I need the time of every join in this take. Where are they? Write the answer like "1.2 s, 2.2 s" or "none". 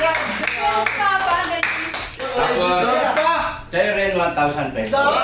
none

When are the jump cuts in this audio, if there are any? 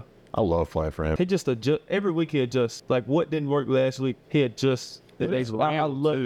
1.1 s, 2.8 s

